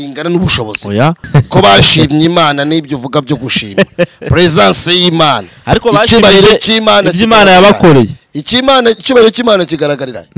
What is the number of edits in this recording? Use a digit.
1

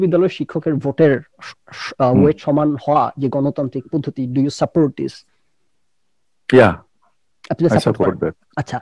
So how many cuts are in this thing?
0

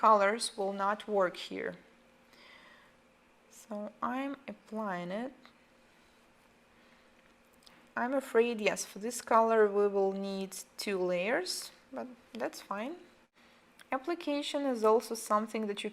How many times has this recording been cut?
1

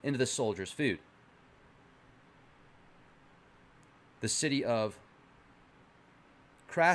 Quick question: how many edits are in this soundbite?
1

